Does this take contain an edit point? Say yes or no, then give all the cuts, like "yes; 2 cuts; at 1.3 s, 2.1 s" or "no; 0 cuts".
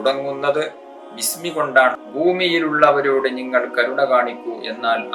yes; 1 cut; at 2.0 s